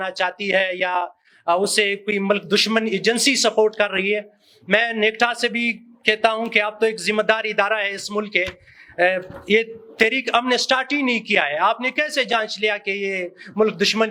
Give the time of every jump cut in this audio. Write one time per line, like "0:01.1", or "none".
none